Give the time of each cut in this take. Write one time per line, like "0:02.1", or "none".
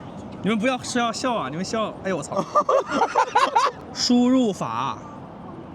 0:03.9